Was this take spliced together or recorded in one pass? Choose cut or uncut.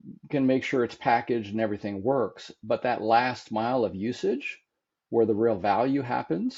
uncut